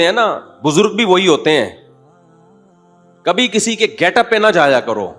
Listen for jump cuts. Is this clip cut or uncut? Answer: uncut